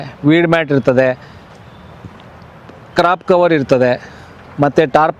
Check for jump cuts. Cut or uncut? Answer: uncut